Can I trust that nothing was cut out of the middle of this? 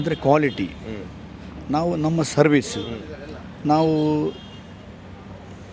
yes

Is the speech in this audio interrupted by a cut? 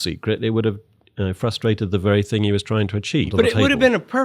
yes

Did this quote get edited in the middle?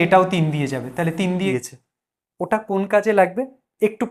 yes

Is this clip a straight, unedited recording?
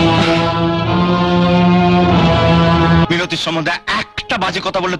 no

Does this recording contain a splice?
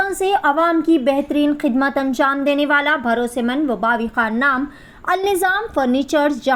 no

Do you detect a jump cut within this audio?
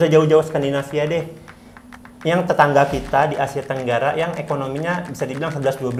no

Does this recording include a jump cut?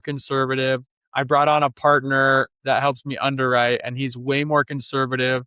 yes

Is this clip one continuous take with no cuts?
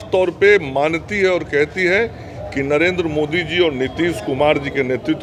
yes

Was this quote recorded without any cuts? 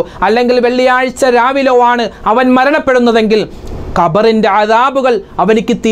yes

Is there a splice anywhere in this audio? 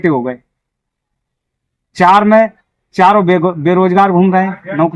no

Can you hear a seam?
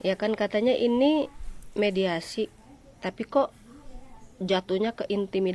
no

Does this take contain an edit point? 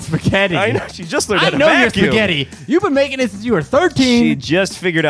no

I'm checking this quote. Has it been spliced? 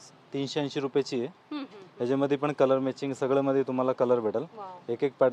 no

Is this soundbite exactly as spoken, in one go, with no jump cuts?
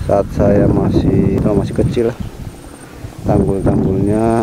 yes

